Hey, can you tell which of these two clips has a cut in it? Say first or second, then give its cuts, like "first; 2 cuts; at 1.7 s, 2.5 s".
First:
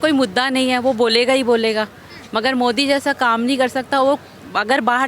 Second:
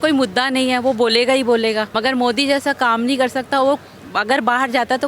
second; 1 cut; at 1.9 s